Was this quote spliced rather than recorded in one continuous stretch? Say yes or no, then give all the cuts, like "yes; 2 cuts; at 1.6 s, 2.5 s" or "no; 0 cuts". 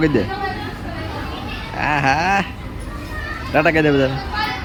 no; 0 cuts